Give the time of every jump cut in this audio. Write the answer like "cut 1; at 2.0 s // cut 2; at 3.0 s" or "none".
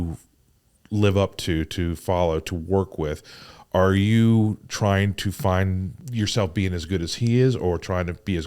cut 1; at 6.0 s